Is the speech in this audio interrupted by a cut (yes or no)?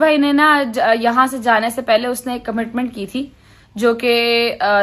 no